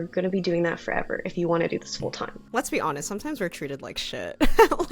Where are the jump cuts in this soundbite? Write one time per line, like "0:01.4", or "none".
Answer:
0:02.3